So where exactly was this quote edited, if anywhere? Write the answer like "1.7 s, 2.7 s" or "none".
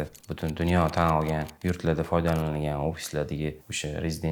none